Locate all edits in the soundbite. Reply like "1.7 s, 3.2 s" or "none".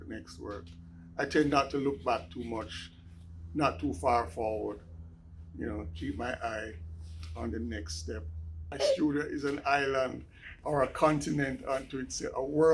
8.8 s